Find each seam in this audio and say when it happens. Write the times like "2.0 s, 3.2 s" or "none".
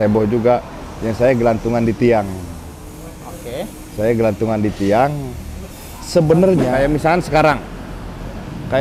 6.7 s